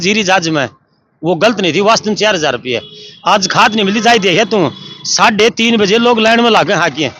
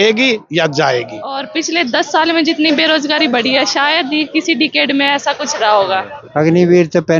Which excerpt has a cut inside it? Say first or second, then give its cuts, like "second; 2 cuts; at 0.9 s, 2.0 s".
second; 2 cuts; at 1.5 s, 6.1 s